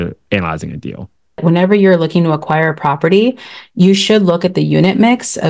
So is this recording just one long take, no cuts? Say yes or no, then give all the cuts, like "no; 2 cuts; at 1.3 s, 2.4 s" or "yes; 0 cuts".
no; 1 cut; at 1.4 s